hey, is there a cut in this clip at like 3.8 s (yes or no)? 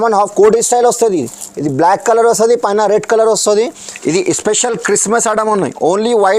yes